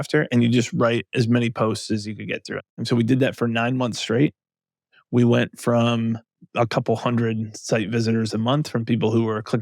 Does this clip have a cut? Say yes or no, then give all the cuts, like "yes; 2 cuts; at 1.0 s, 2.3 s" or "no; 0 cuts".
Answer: yes; 2 cuts; at 2.7 s, 6.4 s